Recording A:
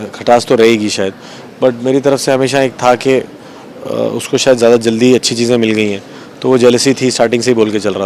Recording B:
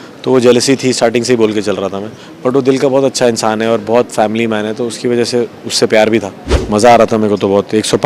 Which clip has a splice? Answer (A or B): B